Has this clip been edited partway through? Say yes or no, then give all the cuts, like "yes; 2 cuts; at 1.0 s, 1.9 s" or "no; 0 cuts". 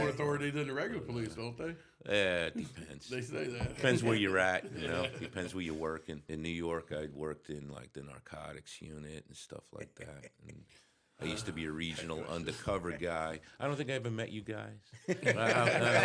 yes; 1 cut; at 6.2 s